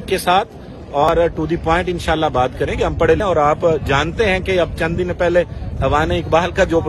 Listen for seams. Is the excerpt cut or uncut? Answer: cut